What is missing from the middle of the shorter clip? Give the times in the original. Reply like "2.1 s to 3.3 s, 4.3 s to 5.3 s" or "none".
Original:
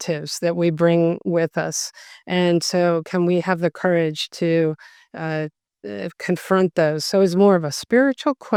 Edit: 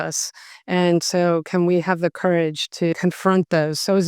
4.5 s to 6.2 s